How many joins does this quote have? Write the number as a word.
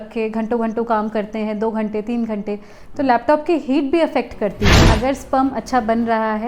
one